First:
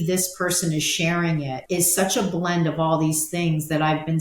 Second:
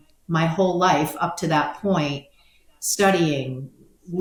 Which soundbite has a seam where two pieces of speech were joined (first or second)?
first